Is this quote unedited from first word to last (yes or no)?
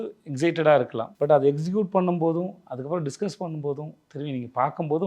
no